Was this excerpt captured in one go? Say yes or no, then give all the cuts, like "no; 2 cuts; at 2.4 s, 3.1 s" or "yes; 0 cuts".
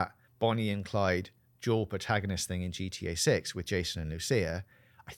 yes; 0 cuts